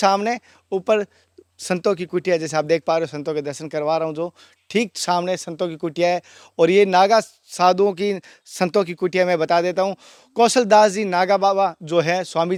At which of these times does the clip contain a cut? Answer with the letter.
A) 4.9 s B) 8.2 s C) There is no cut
C